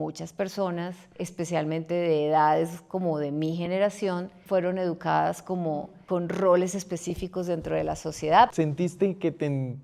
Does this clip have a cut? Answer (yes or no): yes